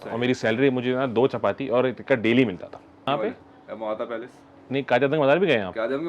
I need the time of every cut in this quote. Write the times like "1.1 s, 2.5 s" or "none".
3.0 s